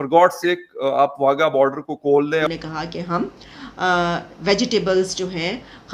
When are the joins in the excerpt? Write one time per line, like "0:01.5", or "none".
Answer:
0:02.5